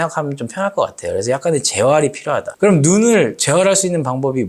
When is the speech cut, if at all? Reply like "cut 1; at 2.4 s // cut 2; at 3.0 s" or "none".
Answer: cut 1; at 2.5 s